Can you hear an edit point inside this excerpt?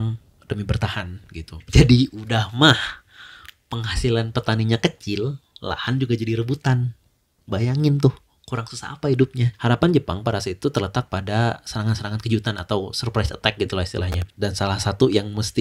yes; 2 cuts; at 1.6 s, 9.5 s

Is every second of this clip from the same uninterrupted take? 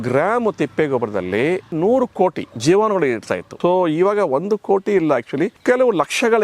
no; 3 cuts; at 2.5 s, 3.4 s, 5.6 s

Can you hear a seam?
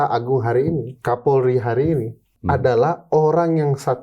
yes; 2 cuts; at 0.9 s, 2.3 s

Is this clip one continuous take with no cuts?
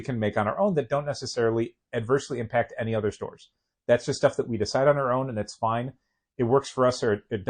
yes; 0 cuts

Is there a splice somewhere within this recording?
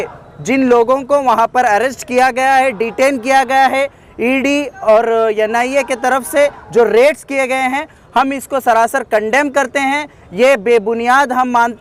no; 0 cuts

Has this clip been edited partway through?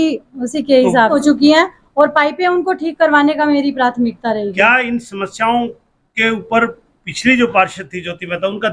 yes; 1 cut; at 1.1 s

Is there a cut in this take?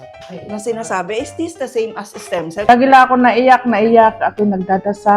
yes; 1 cut; at 2.7 s

